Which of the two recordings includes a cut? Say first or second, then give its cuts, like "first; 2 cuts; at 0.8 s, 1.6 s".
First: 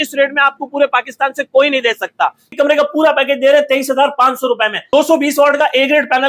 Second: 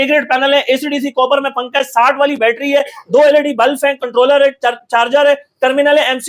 first; 2 cuts; at 2.5 s, 4.8 s